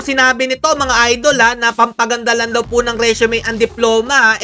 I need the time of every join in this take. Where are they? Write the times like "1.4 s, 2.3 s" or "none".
none